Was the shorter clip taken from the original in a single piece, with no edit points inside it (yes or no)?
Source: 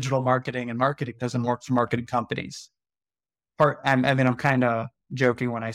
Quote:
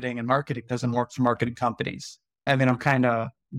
no